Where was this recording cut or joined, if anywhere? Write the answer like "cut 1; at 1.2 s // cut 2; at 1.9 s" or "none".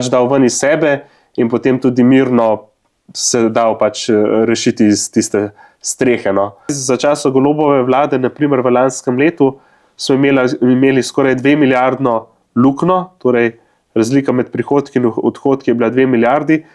cut 1; at 6.8 s